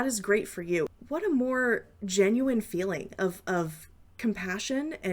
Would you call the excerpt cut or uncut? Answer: cut